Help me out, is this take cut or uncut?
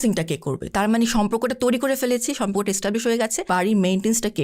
cut